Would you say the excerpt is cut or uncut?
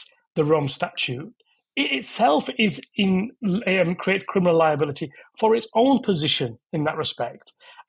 uncut